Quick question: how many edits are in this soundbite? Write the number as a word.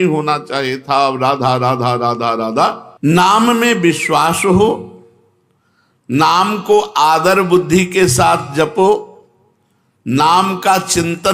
one